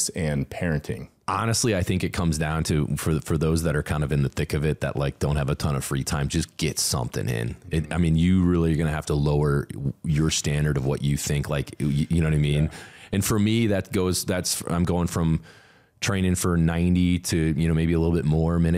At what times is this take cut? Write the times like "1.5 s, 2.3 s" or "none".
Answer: 1.1 s